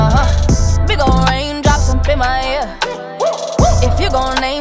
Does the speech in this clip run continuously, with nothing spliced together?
yes; 0 cuts

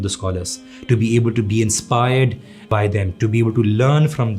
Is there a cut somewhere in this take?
yes; 1 cut; at 2.7 s

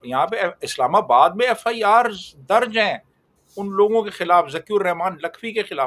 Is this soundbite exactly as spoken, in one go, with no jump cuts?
yes; 0 cuts

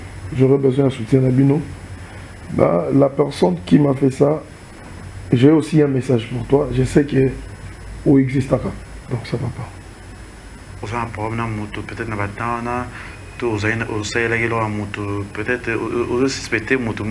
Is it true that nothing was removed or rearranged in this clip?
no; 1 cut; at 9.1 s

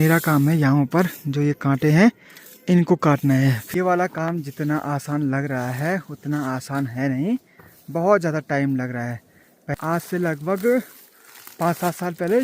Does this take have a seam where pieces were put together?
yes; 2 cuts; at 3.6 s, 9.7 s

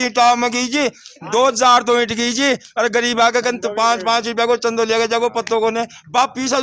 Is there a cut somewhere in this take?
no; 0 cuts

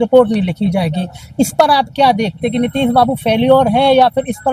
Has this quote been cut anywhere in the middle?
no; 0 cuts

